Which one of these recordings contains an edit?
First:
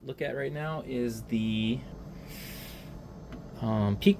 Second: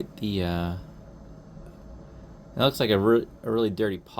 first; 1 cut; at 1.9 s

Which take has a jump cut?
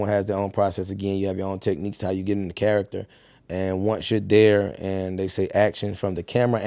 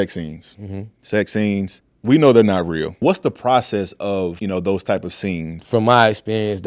second; 3 cuts; at 3.0 s, 4.4 s, 5.6 s

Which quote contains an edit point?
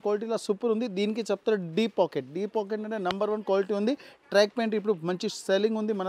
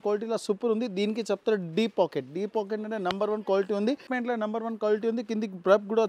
second; 1 cut; at 4.1 s

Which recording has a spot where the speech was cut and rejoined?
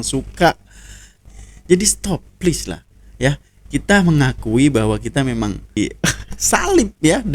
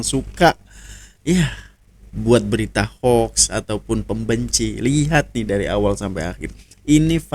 first; 2 cuts; at 1.1 s, 5.8 s

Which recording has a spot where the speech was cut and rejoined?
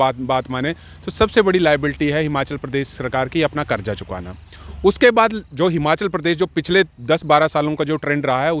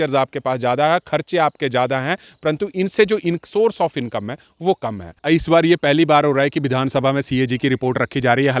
second; 1 cut; at 5.2 s

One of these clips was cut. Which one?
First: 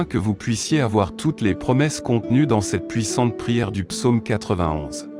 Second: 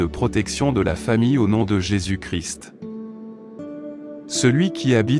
second; 2 cuts; at 2.4 s, 3.8 s

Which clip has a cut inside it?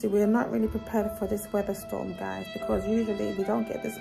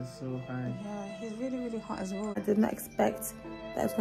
second; 1 cut; at 2.4 s

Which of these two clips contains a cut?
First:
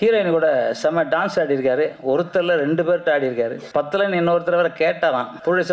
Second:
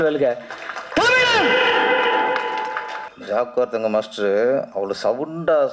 second; 2 cuts; at 3.1 s, 4.7 s

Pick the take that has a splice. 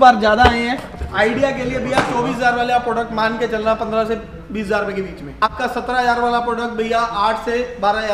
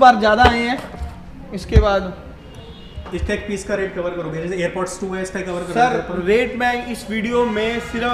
first; 2 cuts; at 1.0 s, 5.4 s

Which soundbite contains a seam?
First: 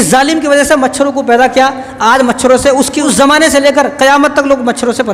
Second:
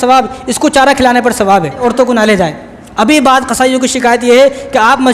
second; 1 cut; at 1.8 s

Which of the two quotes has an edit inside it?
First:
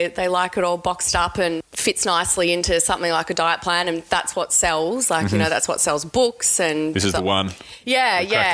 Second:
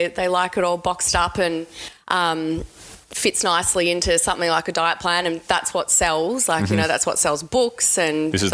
first; 1 cut; at 1.7 s

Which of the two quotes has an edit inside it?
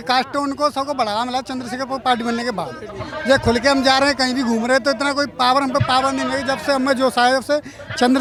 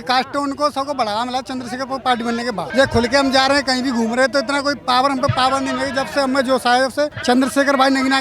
second; 2 cuts; at 2.7 s, 7.2 s

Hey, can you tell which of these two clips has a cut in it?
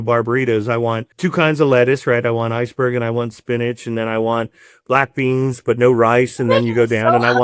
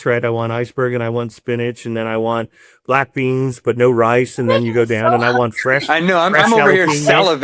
first; 1 cut; at 1.1 s

